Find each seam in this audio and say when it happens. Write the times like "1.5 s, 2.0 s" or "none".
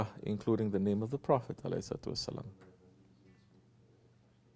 1.0 s

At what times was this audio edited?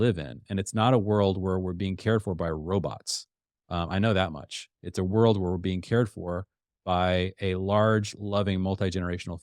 none

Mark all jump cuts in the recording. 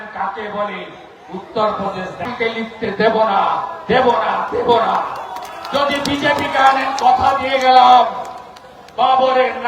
2.3 s

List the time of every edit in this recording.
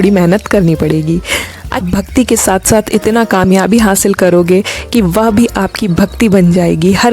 1.4 s

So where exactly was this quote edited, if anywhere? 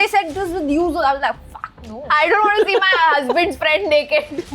2.1 s

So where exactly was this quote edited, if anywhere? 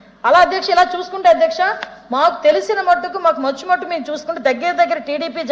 none

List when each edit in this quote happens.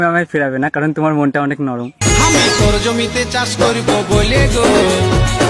1.9 s

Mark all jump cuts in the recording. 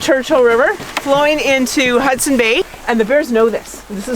2.8 s

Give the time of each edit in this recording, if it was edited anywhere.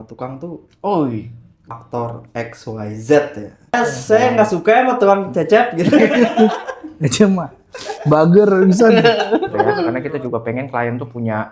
1.8 s, 3.7 s, 10.0 s

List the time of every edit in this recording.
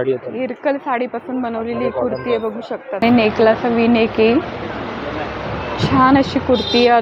3.0 s

